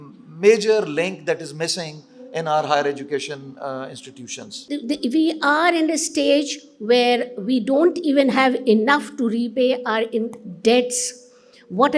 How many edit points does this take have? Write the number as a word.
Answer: one